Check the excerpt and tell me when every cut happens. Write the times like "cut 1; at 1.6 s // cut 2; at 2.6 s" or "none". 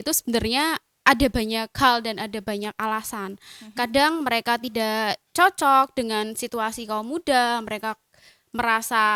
none